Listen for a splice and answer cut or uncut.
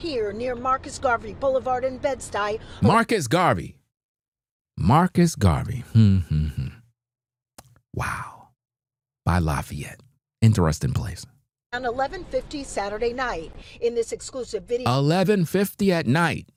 uncut